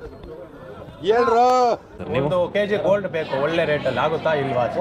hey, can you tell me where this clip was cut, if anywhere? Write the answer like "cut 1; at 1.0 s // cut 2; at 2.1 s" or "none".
cut 1; at 1.9 s

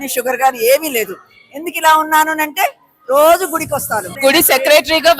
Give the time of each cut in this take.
cut 1; at 4.1 s

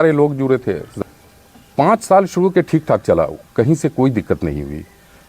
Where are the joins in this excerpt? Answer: cut 1; at 1.0 s

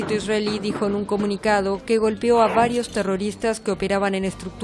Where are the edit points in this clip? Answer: none

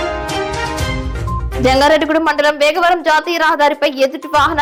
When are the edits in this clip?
none

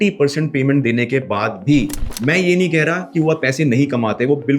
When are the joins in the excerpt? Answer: cut 1; at 2.0 s

